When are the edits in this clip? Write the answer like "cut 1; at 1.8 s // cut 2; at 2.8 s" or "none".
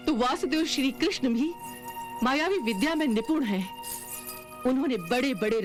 none